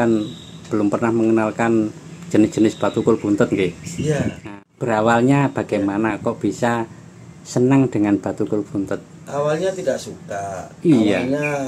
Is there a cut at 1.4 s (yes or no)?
no